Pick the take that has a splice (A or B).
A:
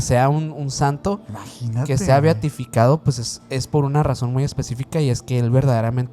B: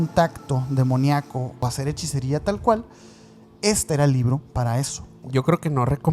B